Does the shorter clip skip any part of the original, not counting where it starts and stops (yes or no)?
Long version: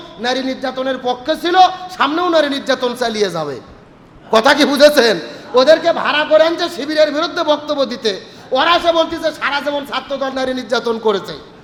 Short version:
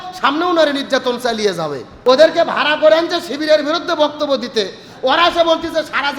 yes